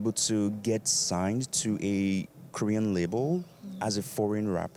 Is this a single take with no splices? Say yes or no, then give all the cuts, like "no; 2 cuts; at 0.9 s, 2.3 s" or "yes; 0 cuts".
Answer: yes; 0 cuts